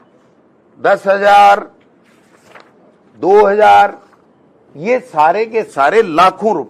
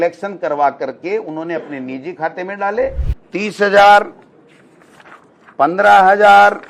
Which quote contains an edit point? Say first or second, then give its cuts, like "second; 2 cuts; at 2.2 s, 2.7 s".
second; 1 cut; at 3.1 s